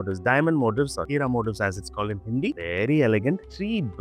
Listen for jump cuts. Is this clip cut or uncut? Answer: cut